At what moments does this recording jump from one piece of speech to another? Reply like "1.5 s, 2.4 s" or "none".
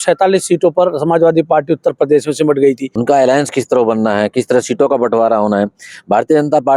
2.9 s

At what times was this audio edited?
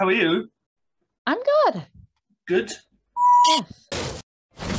3.8 s

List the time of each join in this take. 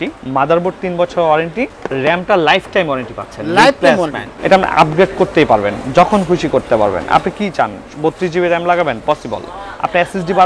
1.8 s, 4.3 s

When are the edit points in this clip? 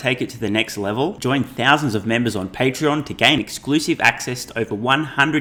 none

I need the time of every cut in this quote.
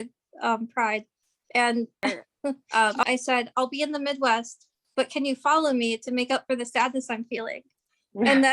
2.6 s

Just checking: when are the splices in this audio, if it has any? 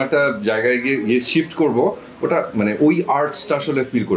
none

